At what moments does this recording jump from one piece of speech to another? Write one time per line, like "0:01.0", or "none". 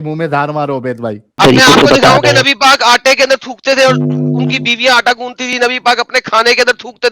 0:01.4